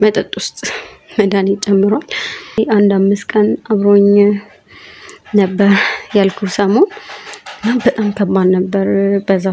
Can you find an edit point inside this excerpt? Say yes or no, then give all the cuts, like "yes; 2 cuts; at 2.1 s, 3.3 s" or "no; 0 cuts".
yes; 1 cut; at 2.6 s